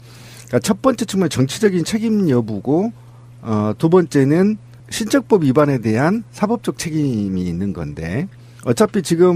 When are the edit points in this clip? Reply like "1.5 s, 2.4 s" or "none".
none